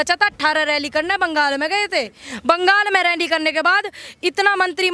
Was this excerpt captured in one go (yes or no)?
yes